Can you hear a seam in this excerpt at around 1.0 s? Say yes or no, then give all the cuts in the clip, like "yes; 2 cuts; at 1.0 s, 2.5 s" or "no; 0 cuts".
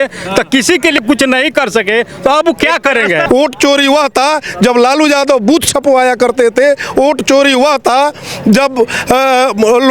yes; 2 cuts; at 1.0 s, 3.2 s